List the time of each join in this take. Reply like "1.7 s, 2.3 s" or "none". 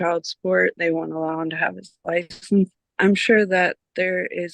2.8 s